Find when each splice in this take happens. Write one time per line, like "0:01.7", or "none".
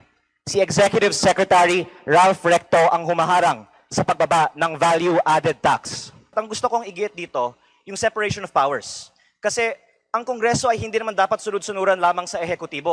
0:06.3